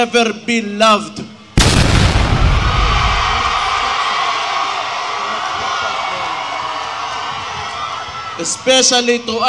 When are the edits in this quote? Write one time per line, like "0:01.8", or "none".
none